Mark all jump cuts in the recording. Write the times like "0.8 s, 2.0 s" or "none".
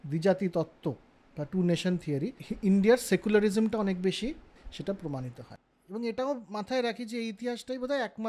2.4 s, 4.6 s, 5.5 s